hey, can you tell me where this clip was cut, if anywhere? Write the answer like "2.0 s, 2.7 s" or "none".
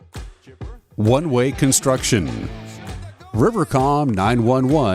0.9 s